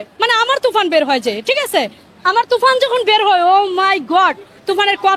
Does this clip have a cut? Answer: no; 0 cuts

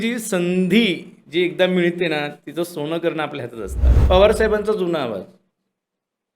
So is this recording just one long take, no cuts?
no; 1 cut; at 3.9 s

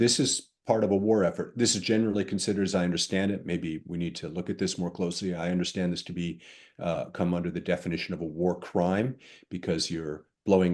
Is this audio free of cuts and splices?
yes; 0 cuts

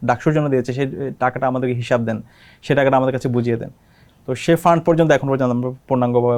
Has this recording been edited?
no; 0 cuts

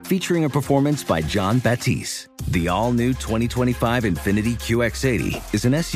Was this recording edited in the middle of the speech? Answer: no; 0 cuts

